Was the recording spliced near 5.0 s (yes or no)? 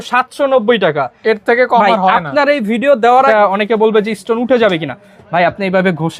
no